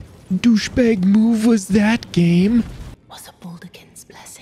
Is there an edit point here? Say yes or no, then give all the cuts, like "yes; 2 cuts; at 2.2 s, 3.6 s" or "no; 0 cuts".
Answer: yes; 1 cut; at 2.9 s